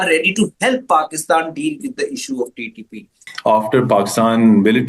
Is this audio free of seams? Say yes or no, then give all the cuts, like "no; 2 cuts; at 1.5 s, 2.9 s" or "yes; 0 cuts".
no; 1 cut; at 3.2 s